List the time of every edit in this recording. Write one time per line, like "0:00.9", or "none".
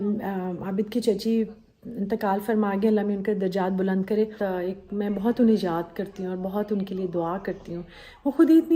0:04.4